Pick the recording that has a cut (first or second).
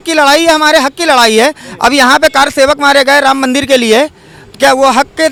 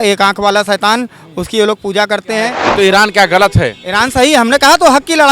second